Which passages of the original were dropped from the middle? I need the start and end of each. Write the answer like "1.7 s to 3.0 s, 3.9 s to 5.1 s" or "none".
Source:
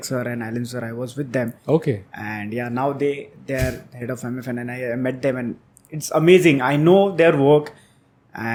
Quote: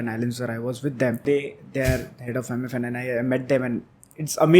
1.6 s to 3.0 s